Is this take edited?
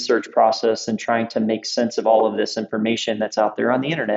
no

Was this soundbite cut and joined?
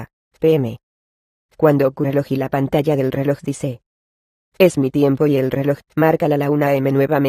no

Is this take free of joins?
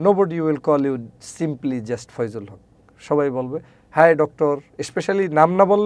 yes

